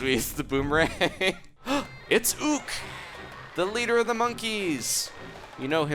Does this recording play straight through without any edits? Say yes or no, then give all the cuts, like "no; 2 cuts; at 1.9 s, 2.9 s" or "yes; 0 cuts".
no; 1 cut; at 1.6 s